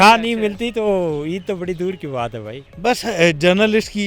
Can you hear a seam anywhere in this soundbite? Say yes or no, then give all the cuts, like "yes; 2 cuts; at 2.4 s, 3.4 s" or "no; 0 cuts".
yes; 1 cut; at 2.7 s